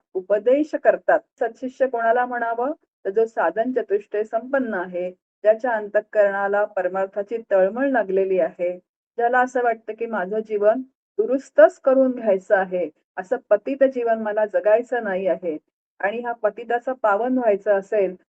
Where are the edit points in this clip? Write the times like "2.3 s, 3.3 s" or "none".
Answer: 1.3 s